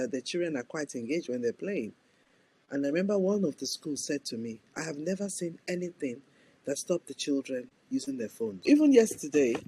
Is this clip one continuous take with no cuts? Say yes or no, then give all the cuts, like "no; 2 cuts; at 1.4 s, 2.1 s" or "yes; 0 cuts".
yes; 0 cuts